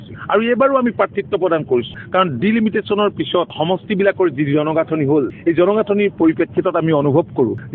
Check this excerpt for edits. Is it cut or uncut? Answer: uncut